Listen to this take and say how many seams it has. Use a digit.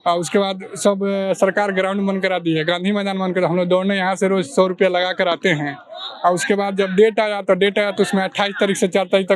0